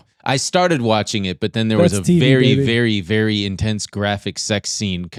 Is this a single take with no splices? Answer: yes; 0 cuts

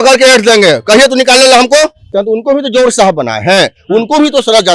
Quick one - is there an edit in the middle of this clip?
yes; 1 cut; at 2.1 s

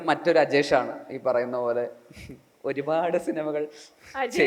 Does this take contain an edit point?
no; 0 cuts

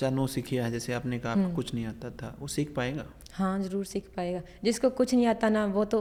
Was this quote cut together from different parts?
no; 0 cuts

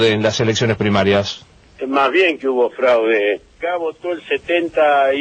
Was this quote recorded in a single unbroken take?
yes; 0 cuts

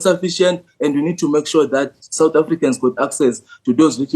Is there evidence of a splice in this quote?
no; 0 cuts

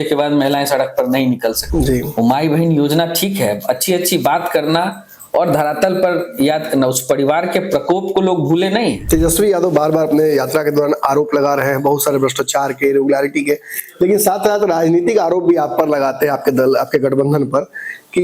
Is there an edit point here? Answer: yes; 2 cuts; at 1.6 s, 9.0 s

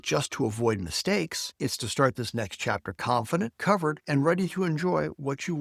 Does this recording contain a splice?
no; 0 cuts

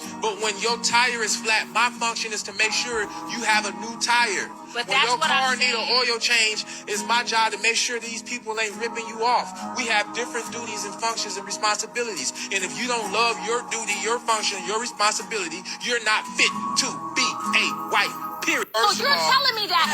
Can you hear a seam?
yes; 1 cut; at 19.0 s

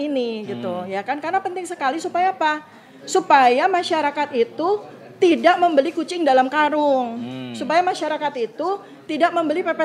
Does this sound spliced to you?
no; 0 cuts

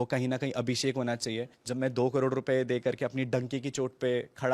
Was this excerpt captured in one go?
no; 1 cut; at 1.6 s

